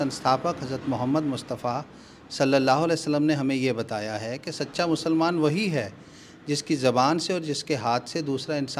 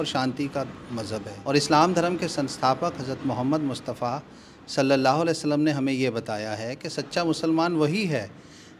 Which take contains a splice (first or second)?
second